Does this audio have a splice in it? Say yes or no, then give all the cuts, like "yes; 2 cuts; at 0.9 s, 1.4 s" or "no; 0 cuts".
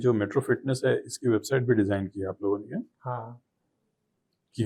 no; 0 cuts